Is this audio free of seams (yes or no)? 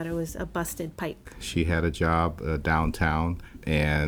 no